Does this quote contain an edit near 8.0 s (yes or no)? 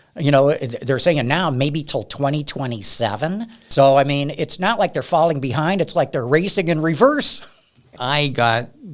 yes